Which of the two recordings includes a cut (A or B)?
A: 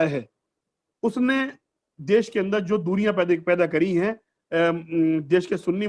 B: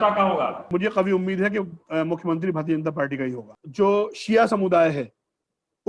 B